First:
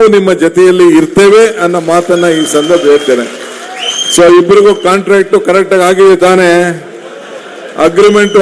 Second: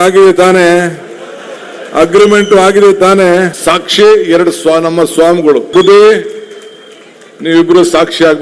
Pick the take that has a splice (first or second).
second